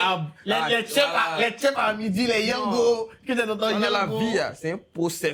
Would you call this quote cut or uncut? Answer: uncut